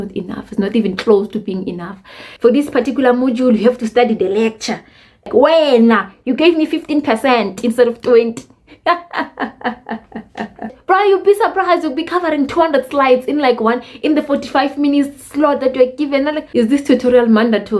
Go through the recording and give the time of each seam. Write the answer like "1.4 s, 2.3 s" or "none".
2.4 s, 5.5 s, 10.7 s, 16.4 s